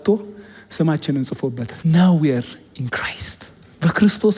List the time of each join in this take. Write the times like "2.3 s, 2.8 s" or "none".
1.7 s